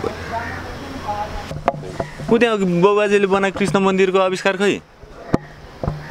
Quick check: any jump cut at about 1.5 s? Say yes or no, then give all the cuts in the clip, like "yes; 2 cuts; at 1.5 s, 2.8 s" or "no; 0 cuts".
yes; 1 cut; at 1.5 s